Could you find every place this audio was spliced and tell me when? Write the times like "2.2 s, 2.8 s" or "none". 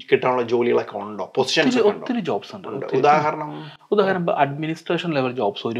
none

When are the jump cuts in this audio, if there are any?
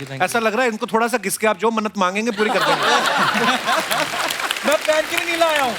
none

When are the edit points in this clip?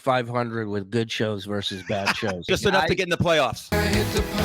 2.5 s, 3.6 s

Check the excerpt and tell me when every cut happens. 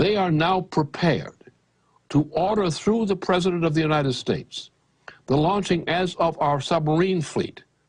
0.9 s

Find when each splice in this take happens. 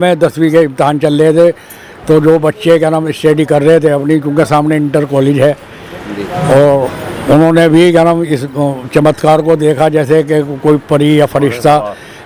none

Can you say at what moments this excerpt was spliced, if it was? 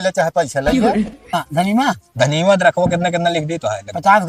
1.4 s

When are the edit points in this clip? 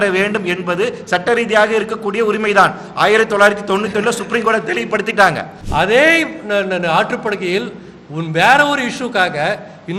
5.5 s

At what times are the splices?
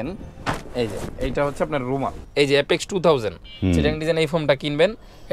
2.2 s

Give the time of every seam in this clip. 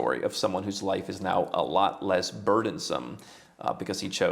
none

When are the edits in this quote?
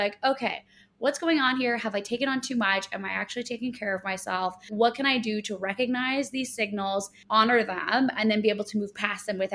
4.7 s, 7.2 s

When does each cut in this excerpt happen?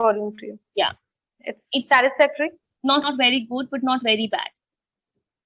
3.0 s

